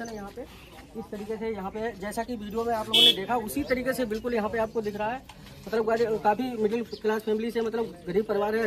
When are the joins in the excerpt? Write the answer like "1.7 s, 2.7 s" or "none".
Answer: none